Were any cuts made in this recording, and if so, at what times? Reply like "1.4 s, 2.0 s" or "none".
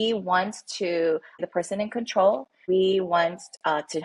1.5 s, 2.5 s